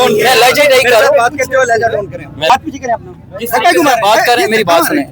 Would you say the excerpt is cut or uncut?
cut